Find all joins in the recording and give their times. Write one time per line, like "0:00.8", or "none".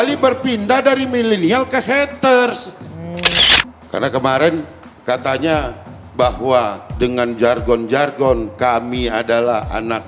0:03.3